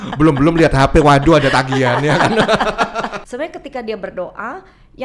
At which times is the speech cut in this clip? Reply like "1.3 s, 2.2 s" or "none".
3.2 s